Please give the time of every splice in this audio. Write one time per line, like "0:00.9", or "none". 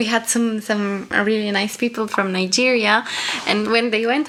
none